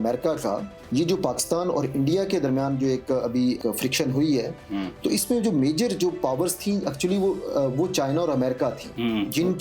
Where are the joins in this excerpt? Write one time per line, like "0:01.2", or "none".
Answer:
none

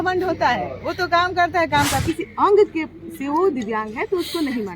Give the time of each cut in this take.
0:02.0

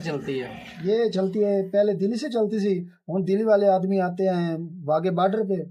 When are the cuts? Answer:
none

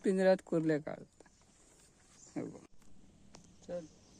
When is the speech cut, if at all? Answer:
0:02.7

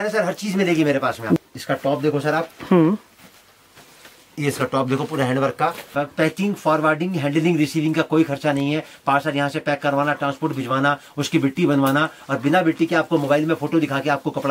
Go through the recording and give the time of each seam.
0:01.4
0:05.8

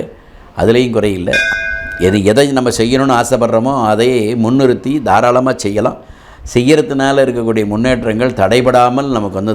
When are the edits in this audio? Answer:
0:01.4

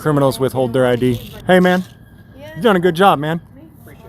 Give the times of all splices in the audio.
0:01.3

